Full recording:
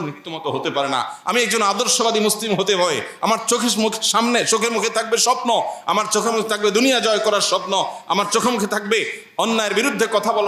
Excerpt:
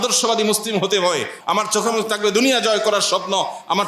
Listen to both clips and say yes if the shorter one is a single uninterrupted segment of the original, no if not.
no